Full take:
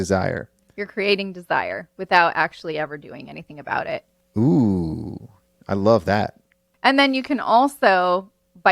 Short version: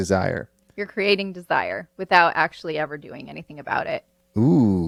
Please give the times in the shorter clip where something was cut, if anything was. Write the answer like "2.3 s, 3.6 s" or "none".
none